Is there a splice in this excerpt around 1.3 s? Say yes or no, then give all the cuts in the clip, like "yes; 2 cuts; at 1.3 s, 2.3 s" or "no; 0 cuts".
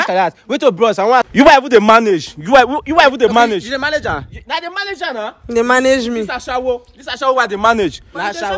yes; 1 cut; at 1.3 s